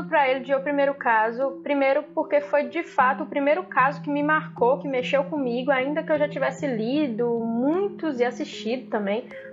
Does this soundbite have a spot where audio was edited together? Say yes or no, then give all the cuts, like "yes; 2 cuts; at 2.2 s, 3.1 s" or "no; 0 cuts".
no; 0 cuts